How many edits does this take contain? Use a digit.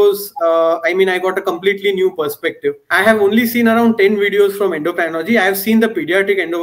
1